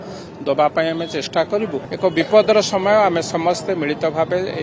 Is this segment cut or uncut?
cut